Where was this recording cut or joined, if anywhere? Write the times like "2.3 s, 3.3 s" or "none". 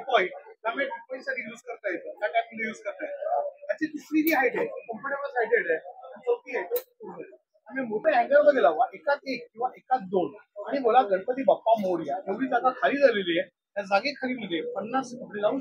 8.0 s